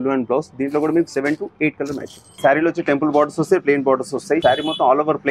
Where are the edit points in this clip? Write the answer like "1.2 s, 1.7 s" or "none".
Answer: 2.2 s, 4.4 s